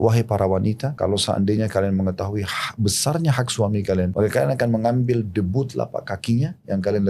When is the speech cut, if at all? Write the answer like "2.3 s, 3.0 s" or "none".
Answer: 0.9 s, 4.1 s